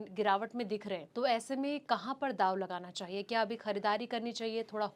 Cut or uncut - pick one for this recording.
cut